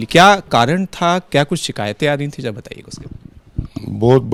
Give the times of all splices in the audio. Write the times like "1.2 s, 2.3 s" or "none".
none